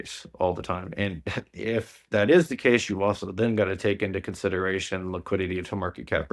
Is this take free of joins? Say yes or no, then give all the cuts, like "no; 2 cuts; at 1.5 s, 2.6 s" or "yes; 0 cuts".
yes; 0 cuts